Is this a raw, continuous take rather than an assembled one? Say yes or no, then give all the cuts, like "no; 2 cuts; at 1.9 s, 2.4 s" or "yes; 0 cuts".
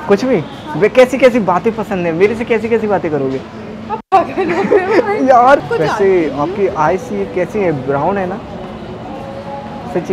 no; 1 cut; at 5.7 s